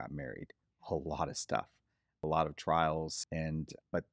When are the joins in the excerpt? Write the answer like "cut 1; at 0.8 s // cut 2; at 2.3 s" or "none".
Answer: none